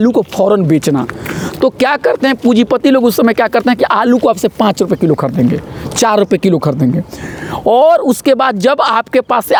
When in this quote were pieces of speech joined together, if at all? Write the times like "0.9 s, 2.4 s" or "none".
none